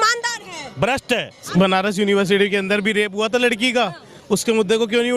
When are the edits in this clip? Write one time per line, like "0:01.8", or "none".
0:01.5